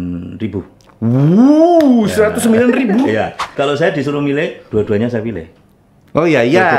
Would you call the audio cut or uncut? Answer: cut